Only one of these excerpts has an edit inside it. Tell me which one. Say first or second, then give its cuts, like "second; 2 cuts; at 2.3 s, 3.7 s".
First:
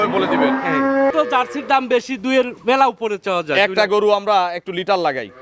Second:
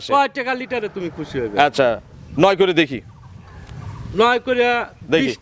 first; 1 cut; at 1.1 s